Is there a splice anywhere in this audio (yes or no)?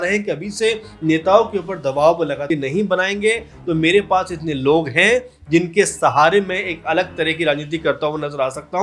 yes